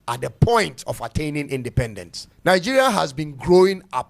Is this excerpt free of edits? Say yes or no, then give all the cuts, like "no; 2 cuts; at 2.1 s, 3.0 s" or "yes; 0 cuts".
no; 1 cut; at 2.3 s